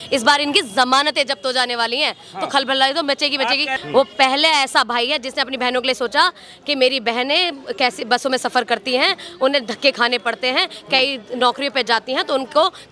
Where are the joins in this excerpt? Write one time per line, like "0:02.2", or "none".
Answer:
0:03.7